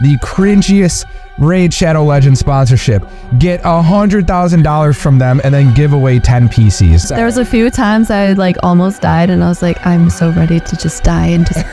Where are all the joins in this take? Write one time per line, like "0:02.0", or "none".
0:07.0